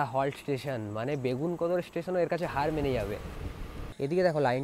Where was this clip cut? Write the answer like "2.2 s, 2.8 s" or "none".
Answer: 3.7 s